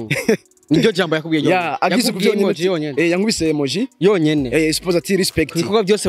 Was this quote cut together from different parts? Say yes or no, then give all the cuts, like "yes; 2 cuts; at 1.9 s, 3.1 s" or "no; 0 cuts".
no; 0 cuts